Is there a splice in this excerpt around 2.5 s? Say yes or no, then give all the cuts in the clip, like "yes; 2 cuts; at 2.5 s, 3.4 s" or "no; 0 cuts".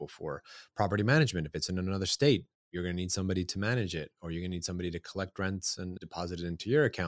no; 1 cut; at 5.9 s